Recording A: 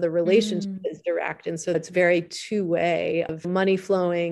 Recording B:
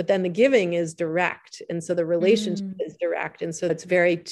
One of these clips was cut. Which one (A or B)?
A